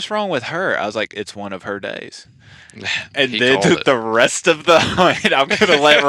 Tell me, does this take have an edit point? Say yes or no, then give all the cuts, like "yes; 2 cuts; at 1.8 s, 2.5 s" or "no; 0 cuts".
no; 0 cuts